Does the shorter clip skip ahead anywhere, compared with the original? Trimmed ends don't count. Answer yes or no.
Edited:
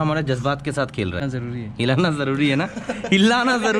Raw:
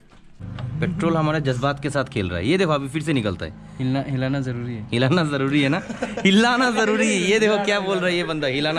yes